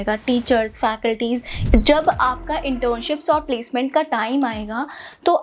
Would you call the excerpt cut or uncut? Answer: cut